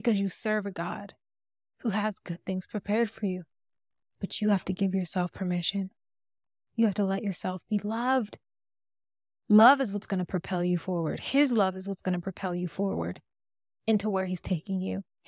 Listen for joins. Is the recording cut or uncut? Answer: uncut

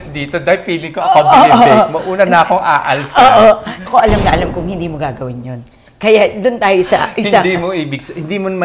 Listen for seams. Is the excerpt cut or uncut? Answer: cut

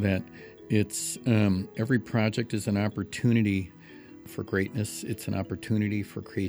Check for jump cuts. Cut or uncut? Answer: cut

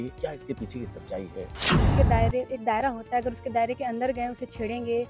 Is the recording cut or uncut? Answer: cut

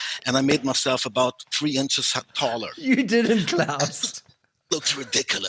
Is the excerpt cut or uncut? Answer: uncut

